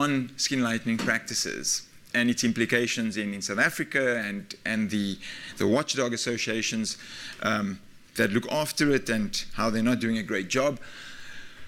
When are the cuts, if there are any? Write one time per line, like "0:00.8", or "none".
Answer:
0:03.4